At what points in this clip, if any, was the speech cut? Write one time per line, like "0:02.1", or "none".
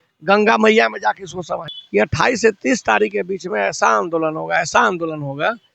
0:01.7